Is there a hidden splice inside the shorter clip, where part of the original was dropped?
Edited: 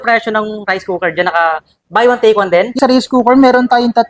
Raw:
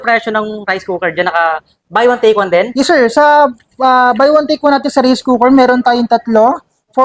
yes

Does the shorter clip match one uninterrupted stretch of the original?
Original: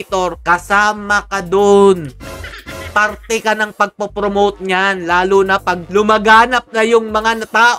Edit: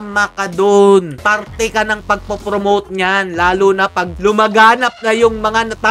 no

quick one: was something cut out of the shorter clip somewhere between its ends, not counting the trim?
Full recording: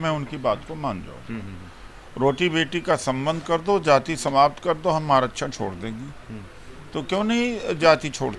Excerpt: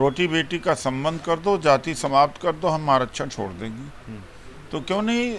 no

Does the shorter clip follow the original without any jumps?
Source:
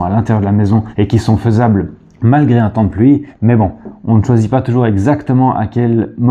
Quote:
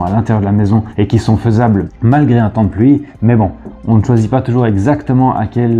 no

